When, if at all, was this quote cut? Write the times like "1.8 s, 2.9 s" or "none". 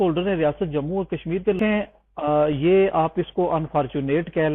1.6 s